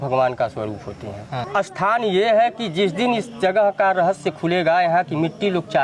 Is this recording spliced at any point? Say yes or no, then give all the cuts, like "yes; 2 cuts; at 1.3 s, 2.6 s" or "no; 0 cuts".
yes; 1 cut; at 1.5 s